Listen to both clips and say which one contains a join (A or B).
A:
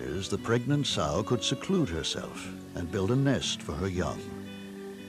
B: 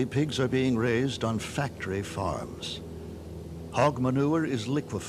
A